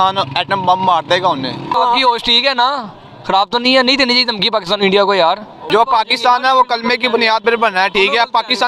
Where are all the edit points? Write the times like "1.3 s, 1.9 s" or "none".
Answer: 1.8 s, 5.7 s

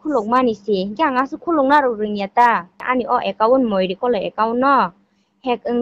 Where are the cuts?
2.8 s

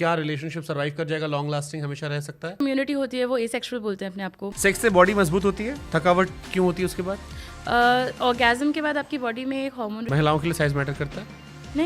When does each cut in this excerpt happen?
2.6 s, 4.5 s, 10.1 s

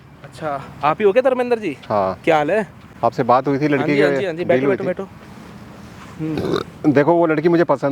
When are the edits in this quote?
none

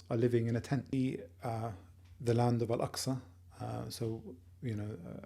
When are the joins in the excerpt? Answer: 0.9 s

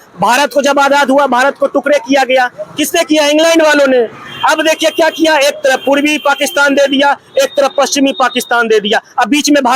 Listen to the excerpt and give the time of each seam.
none

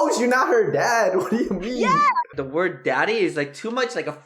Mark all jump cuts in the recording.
2.3 s

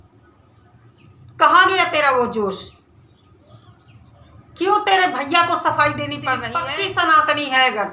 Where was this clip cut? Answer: 6.5 s

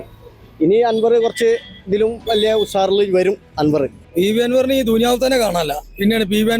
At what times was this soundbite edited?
4.0 s

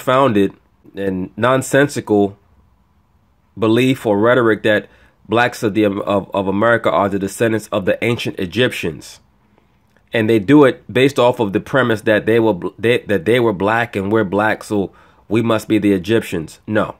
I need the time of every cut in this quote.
0.9 s

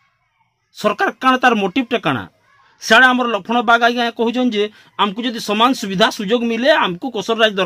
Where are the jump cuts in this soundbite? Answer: none

